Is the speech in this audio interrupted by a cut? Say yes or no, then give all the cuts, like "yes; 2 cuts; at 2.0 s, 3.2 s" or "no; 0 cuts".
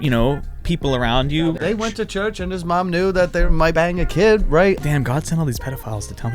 yes; 3 cuts; at 1.5 s, 3.6 s, 4.8 s